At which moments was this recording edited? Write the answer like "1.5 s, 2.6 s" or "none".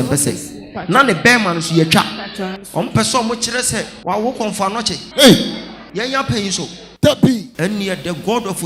2.6 s, 3.9 s, 5.0 s, 5.8 s, 7.5 s